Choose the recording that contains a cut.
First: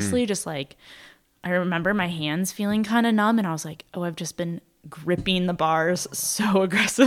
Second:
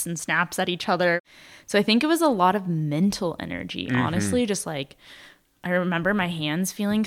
second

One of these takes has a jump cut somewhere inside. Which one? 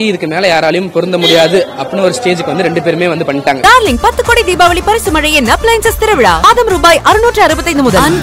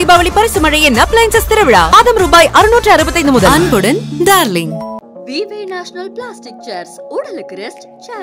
first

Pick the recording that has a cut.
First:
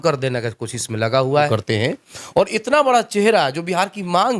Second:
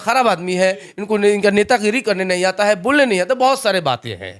first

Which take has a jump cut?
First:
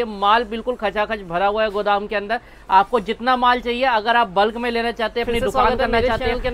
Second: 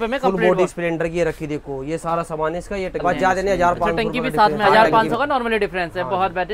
second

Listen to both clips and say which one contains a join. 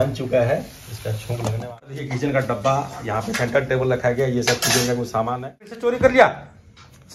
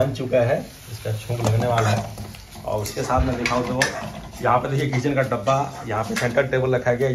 first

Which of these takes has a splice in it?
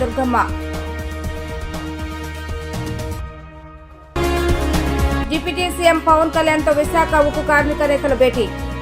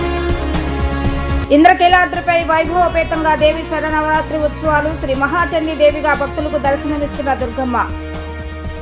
second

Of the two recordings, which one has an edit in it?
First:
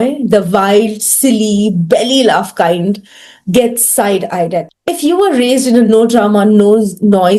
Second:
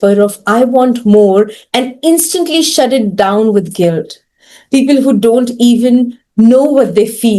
first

